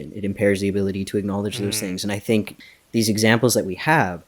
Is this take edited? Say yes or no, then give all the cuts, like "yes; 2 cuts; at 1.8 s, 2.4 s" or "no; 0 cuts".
yes; 1 cut; at 2.5 s